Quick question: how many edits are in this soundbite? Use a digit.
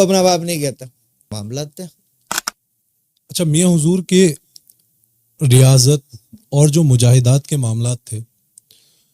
1